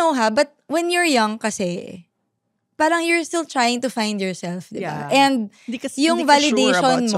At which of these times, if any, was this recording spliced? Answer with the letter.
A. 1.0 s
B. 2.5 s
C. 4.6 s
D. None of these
D